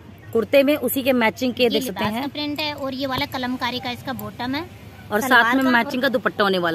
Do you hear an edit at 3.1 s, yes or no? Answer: no